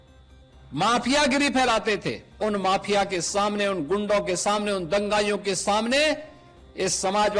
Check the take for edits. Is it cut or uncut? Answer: cut